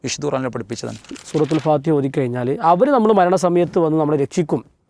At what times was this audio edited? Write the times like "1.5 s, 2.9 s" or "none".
1.2 s